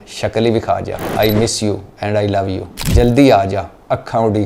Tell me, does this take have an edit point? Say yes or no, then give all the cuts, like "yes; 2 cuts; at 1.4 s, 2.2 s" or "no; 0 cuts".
yes; 2 cuts; at 1.0 s, 2.7 s